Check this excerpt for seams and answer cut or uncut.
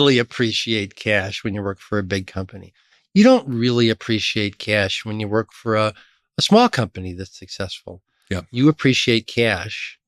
uncut